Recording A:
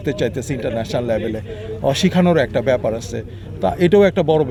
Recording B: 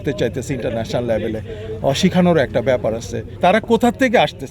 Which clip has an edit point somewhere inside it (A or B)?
B